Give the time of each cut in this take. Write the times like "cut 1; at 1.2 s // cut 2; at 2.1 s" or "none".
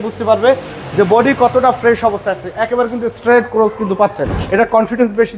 cut 1; at 4.4 s